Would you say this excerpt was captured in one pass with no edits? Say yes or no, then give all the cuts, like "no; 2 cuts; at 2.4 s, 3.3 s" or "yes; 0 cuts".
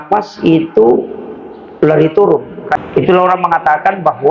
no; 1 cut; at 2.8 s